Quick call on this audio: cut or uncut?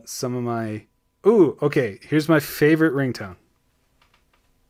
uncut